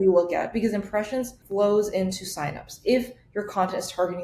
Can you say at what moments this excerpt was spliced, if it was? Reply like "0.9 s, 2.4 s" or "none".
1.4 s